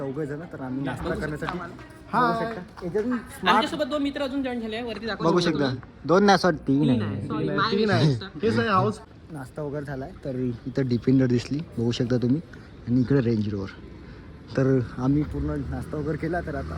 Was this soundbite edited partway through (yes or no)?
yes